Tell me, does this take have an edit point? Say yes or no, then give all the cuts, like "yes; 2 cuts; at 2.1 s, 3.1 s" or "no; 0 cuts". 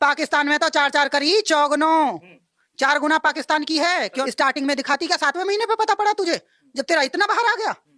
yes; 1 cut; at 4.2 s